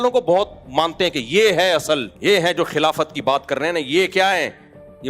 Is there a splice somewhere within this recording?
yes; 1 cut; at 2.1 s

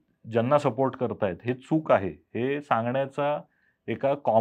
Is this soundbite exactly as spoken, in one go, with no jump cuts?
yes; 0 cuts

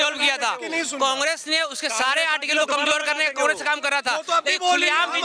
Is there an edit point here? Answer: no; 0 cuts

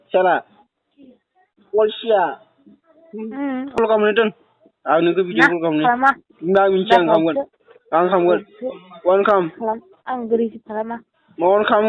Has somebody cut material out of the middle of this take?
yes; 1 cut; at 3.8 s

